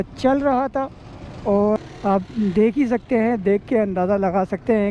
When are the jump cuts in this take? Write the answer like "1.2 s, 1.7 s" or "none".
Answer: 1.8 s